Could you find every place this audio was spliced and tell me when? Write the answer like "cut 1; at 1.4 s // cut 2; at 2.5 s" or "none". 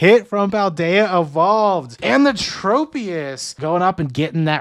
cut 1; at 1.9 s // cut 2; at 3.4 s